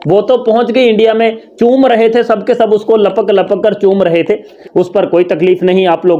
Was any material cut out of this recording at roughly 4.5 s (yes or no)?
yes